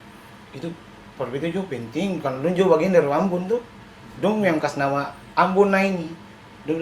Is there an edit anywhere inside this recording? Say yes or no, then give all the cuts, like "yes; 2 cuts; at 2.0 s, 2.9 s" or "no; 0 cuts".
no; 0 cuts